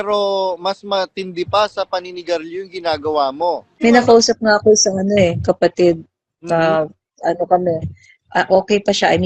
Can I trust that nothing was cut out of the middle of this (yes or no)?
no